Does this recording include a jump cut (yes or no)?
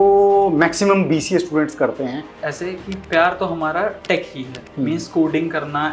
yes